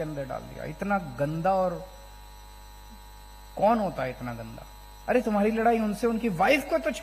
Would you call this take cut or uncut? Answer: uncut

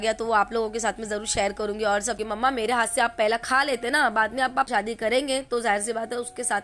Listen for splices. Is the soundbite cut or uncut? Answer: cut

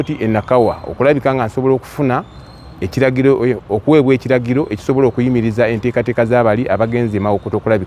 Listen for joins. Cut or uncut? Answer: uncut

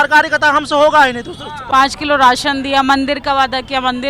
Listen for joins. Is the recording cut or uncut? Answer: cut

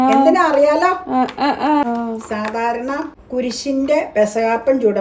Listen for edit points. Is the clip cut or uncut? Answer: cut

